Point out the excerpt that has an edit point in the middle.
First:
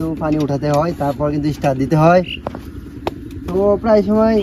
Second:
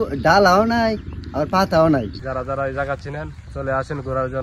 second; 1 cut; at 2.2 s

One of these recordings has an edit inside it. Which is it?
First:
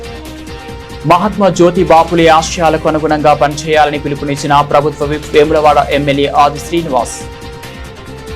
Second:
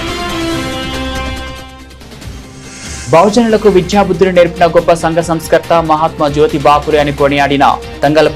first; 2 cuts; at 1.0 s, 7.1 s

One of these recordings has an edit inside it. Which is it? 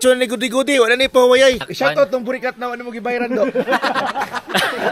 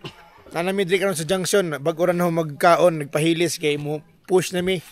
first; 1 cut; at 1.7 s

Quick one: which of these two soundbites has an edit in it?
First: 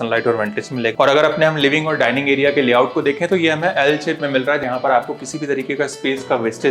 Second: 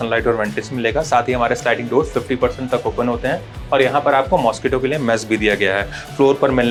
first; 2 cuts; at 0.9 s, 4.6 s

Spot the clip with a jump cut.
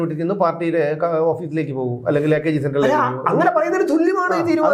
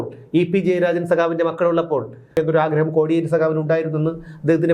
second; 1 cut; at 2.3 s

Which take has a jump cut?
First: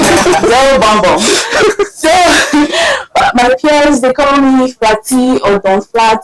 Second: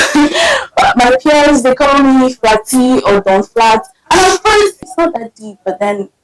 second; 1 cut; at 4.8 s

